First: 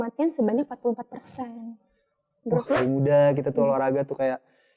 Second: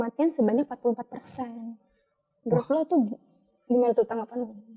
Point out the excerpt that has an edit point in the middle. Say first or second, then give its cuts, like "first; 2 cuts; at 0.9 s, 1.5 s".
first; 1 cut; at 2.8 s